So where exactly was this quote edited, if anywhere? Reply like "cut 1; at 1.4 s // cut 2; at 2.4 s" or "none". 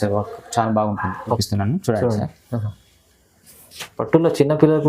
cut 1; at 1.4 s

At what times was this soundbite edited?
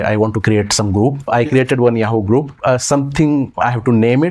cut 1; at 1.3 s // cut 2; at 2.5 s

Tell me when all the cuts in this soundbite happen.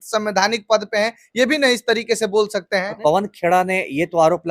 cut 1; at 3.0 s

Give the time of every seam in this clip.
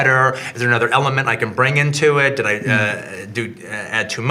none

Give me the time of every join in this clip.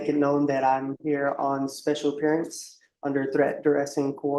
none

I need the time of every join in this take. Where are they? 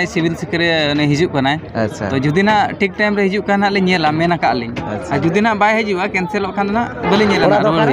none

